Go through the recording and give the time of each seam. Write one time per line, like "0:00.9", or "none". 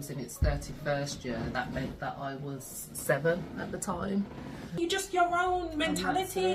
0:04.8